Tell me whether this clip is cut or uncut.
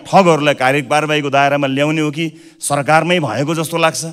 uncut